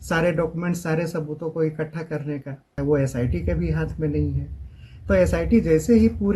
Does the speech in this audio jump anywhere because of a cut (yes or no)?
yes